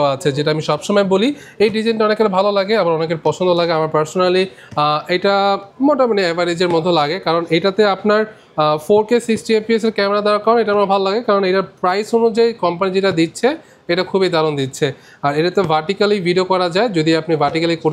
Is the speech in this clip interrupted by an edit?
no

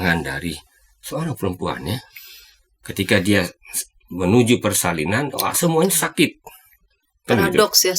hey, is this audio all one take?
yes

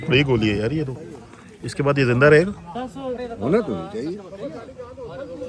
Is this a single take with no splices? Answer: yes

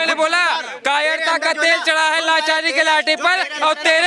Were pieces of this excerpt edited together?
no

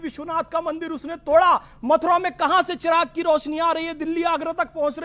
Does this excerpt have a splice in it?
no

